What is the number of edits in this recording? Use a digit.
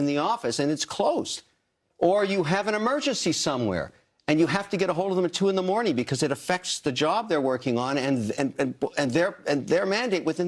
0